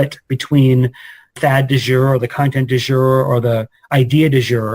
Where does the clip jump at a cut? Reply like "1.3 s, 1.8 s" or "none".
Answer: 1.3 s